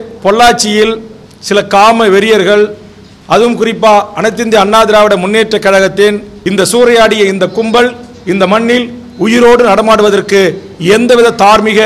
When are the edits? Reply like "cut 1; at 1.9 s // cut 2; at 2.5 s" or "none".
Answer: cut 1; at 6.3 s